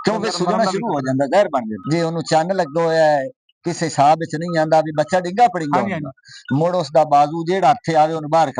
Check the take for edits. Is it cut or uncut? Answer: cut